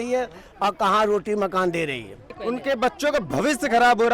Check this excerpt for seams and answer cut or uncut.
cut